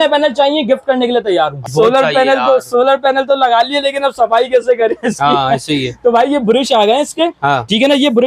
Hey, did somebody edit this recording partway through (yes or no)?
yes